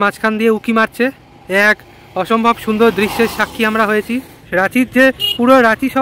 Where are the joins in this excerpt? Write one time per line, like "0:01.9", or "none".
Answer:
0:04.4